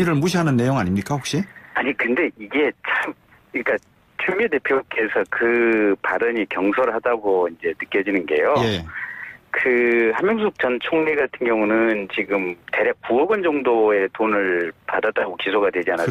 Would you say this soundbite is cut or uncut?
uncut